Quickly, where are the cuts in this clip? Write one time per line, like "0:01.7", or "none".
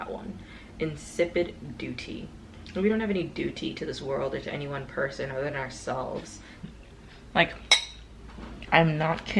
0:06.7